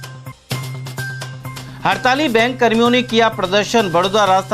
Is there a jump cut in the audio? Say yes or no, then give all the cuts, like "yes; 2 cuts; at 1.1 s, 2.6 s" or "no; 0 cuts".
yes; 1 cut; at 1.2 s